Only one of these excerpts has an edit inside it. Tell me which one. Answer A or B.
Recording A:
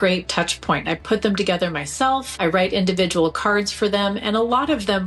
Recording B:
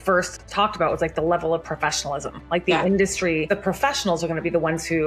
B